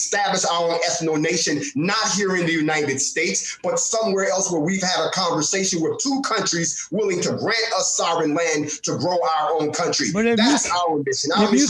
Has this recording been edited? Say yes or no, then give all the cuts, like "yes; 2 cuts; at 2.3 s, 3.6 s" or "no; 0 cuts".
no; 0 cuts